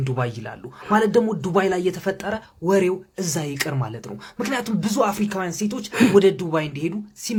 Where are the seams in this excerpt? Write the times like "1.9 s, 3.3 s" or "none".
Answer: none